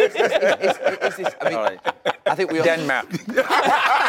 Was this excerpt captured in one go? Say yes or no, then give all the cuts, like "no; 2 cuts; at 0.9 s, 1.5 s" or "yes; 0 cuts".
no; 1 cut; at 2.6 s